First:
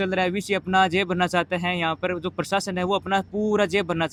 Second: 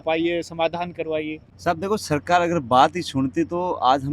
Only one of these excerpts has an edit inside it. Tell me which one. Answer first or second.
second